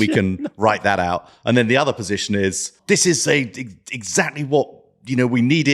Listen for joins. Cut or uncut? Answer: cut